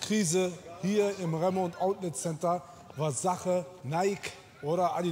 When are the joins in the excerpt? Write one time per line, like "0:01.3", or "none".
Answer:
none